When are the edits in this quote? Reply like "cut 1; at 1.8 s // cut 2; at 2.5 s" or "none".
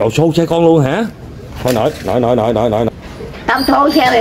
cut 1; at 2.9 s